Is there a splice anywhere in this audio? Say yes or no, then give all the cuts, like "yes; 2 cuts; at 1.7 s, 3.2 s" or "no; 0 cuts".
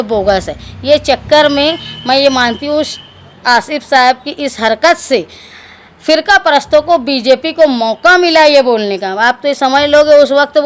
no; 0 cuts